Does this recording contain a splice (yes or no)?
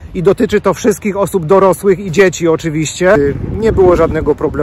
yes